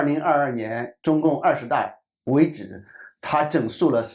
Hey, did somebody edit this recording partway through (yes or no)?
no